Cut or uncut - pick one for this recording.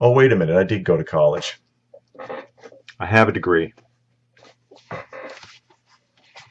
cut